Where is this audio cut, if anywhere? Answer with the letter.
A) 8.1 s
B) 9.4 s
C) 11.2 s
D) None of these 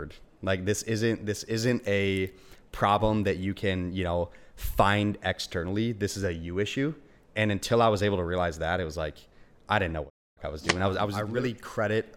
C